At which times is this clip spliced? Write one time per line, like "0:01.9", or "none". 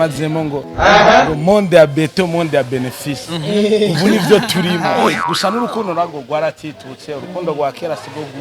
0:05.2